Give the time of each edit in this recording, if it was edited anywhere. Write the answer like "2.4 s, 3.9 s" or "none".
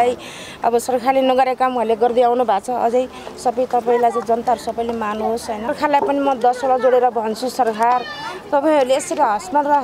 5.7 s